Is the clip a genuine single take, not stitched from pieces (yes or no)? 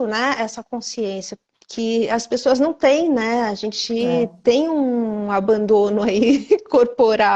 yes